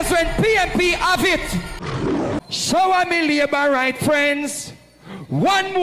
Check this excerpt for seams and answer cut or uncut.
cut